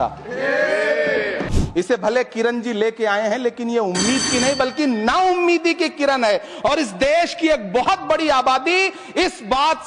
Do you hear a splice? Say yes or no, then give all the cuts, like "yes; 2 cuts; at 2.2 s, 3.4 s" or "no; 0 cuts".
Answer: yes; 1 cut; at 1.5 s